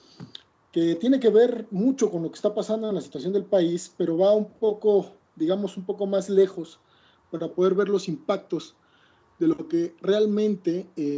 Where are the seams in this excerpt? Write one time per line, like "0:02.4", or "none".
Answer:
0:09.7